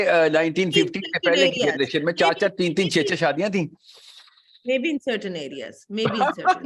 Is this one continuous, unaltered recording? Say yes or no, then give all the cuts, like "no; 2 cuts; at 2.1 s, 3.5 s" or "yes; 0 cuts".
yes; 0 cuts